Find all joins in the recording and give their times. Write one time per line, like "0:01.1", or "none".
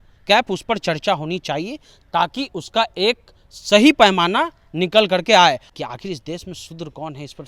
0:05.7

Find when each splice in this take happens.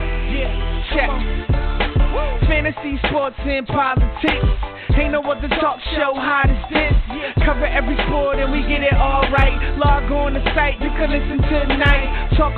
none

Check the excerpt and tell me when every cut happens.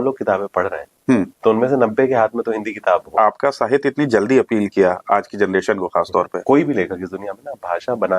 0:01.3
0:03.1
0:06.4

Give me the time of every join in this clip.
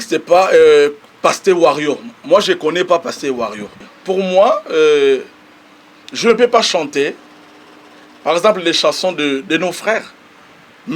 0:03.8

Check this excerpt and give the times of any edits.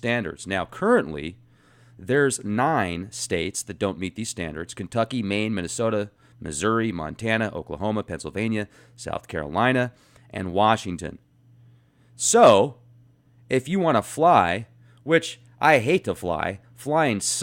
0:13.7

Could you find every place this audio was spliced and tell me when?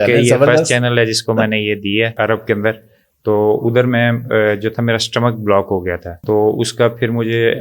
0:02.1
0:06.1

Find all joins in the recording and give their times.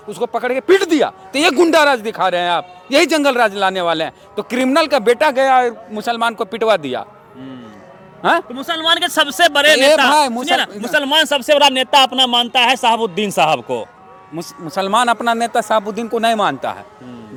none

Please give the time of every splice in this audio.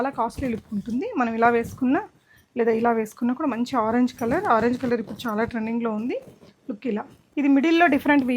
0:07.2

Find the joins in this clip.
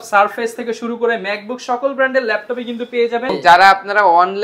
0:03.3

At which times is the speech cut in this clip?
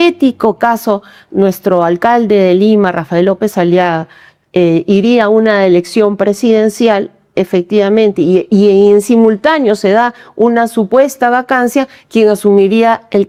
none

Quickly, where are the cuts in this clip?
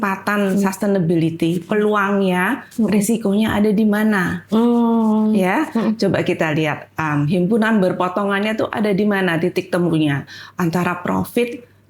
none

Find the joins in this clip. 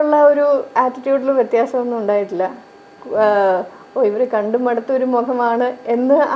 none

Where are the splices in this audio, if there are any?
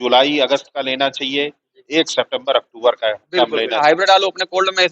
0:03.8

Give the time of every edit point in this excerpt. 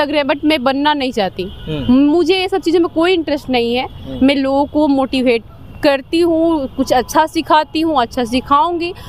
none

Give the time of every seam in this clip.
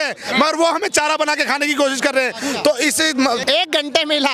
0:03.4

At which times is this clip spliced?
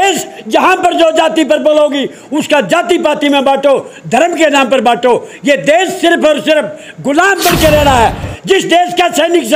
0:08.3

